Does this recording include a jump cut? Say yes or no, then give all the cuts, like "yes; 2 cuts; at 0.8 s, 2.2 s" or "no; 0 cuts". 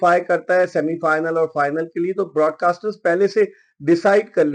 no; 0 cuts